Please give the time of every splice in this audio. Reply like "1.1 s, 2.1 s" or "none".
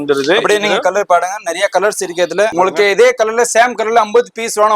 2.5 s